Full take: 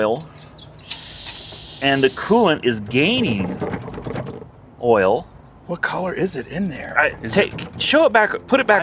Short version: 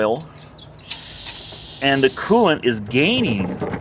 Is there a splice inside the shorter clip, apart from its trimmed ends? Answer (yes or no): no